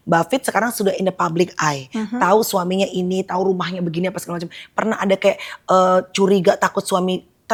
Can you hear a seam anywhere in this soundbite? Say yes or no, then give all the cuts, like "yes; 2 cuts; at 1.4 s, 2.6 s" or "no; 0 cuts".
no; 0 cuts